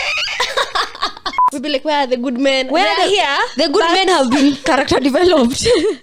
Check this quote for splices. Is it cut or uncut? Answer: cut